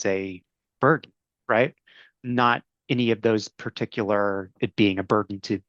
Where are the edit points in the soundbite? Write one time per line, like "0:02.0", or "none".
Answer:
0:02.1
0:04.5